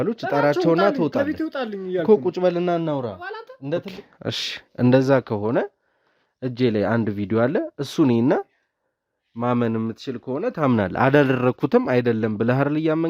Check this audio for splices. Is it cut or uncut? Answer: cut